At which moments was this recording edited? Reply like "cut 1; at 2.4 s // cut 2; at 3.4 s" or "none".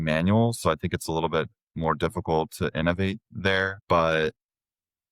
cut 1; at 3.7 s

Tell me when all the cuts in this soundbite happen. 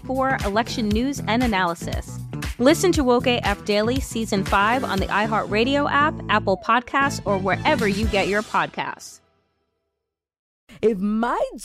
cut 1; at 10.7 s

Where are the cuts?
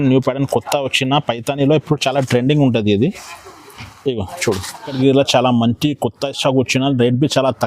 cut 1; at 5.0 s

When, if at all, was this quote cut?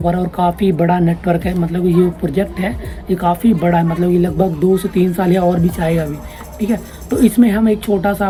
none

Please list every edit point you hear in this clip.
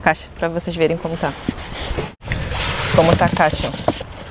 cut 1; at 2.2 s

